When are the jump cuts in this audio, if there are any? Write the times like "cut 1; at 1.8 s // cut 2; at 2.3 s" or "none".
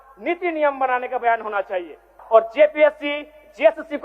cut 1; at 2.1 s